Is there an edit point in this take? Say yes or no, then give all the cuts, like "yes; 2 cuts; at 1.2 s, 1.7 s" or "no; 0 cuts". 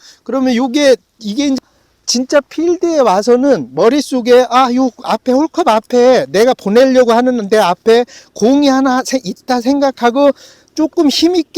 yes; 2 cuts; at 1.0 s, 1.7 s